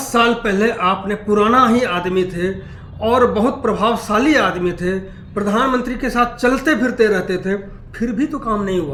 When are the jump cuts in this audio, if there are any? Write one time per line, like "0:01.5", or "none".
none